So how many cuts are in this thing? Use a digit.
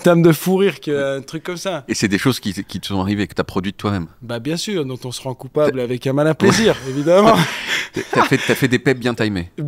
0